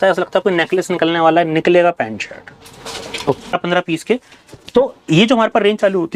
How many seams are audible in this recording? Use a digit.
1